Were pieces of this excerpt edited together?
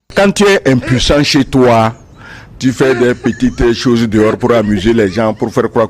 no; 0 cuts

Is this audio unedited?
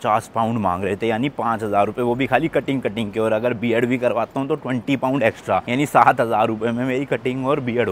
yes; 0 cuts

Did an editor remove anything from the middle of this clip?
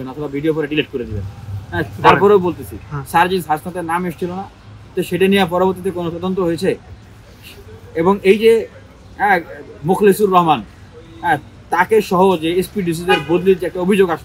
no; 0 cuts

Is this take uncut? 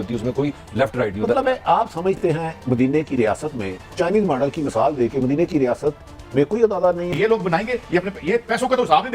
no; 1 cut; at 7.1 s

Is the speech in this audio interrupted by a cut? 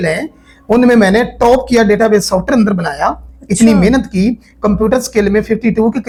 no; 0 cuts

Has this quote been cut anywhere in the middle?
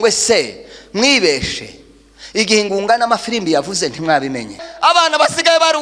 yes; 1 cut; at 4.7 s

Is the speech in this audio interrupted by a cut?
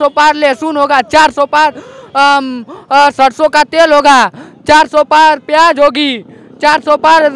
no; 0 cuts

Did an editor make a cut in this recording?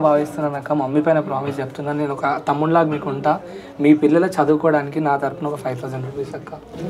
no; 0 cuts

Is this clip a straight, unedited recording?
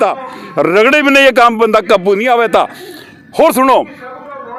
yes; 0 cuts

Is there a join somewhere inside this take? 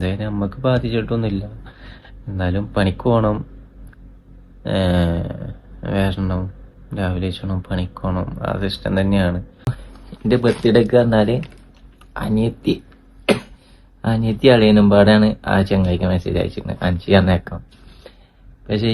yes; 1 cut; at 9.8 s

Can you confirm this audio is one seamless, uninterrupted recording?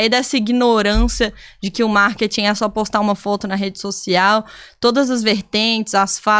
yes; 0 cuts

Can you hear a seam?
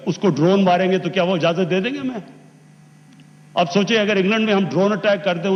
no; 0 cuts

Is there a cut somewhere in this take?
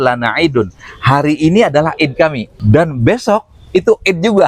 yes; 1 cut; at 2.5 s

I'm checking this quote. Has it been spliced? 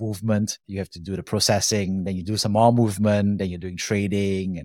no; 0 cuts

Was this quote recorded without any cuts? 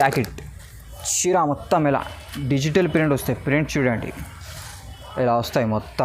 yes; 0 cuts

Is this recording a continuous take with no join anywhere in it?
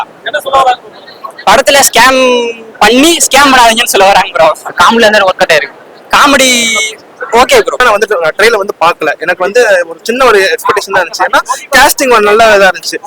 no; 1 cut; at 7.7 s

